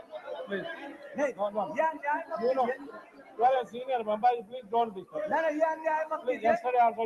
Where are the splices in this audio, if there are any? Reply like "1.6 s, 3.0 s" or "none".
none